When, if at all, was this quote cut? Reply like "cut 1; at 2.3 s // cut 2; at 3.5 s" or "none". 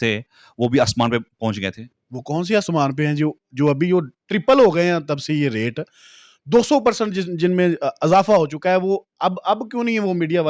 none